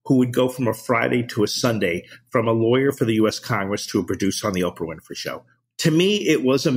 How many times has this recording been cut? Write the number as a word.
one